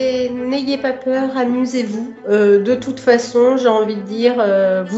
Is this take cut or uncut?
uncut